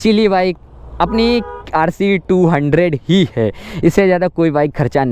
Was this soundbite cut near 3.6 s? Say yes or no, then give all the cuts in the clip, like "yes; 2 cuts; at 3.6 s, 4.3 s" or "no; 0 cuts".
no; 0 cuts